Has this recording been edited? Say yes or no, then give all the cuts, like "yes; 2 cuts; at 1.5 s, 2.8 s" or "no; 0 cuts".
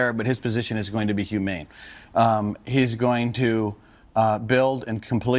no; 0 cuts